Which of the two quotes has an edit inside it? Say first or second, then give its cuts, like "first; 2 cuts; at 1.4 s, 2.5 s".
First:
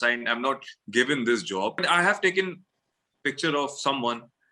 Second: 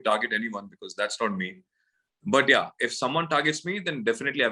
first; 1 cut; at 1.8 s